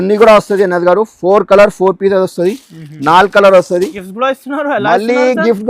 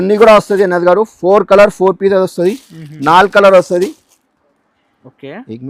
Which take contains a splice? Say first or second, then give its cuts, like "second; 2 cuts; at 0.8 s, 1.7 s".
first; 1 cut; at 4.0 s